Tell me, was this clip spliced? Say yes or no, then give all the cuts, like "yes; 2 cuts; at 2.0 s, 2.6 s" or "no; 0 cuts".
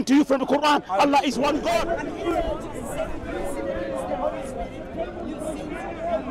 no; 0 cuts